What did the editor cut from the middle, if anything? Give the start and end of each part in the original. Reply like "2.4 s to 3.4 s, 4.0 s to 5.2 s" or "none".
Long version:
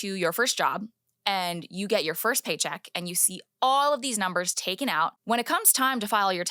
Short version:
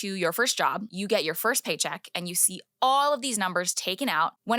0.9 s to 1.7 s